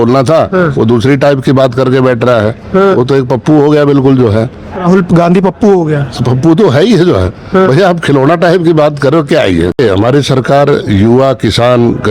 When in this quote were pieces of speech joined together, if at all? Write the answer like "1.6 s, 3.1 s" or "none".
9.7 s